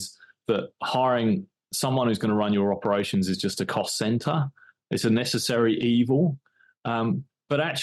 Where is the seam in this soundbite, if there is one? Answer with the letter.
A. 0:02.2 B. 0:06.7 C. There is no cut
C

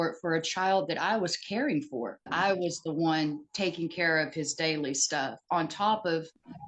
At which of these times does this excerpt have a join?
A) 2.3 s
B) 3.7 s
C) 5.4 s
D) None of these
A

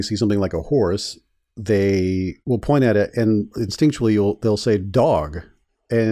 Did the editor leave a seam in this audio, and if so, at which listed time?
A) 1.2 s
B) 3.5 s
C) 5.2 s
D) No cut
B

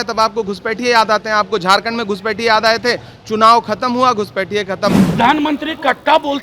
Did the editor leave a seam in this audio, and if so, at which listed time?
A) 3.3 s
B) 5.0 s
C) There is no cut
B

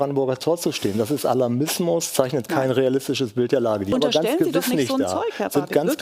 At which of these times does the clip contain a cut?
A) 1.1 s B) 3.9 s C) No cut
B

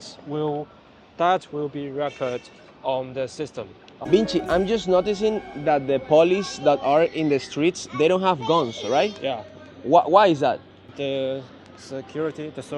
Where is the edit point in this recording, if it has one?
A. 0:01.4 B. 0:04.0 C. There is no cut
B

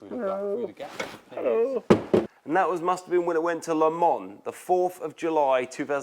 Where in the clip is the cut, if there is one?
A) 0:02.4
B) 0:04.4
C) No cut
A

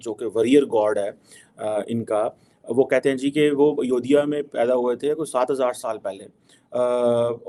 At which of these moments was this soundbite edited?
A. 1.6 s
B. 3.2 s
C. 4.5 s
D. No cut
D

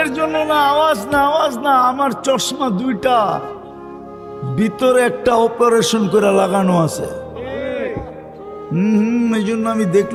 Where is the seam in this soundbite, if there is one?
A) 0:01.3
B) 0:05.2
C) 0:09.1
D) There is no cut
D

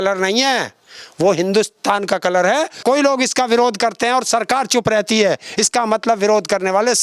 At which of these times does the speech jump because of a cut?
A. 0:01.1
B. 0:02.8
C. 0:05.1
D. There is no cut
B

